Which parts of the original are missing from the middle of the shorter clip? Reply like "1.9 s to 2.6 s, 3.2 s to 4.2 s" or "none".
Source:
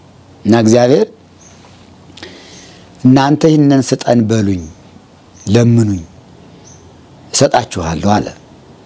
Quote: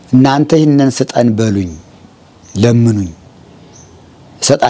none